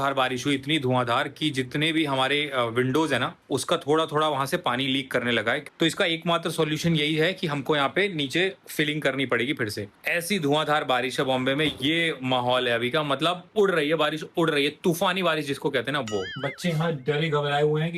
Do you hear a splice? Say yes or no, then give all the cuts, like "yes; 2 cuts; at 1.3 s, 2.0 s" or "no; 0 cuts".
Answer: yes; 3 cuts; at 5.7 s, 9.9 s, 16.3 s